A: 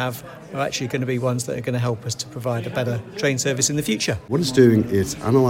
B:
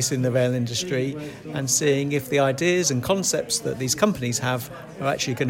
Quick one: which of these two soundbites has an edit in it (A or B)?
A